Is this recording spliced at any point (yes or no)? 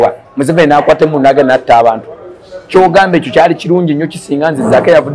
no